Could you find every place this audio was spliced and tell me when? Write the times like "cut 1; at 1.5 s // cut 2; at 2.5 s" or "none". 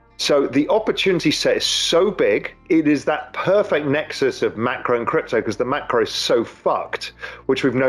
cut 1; at 2.6 s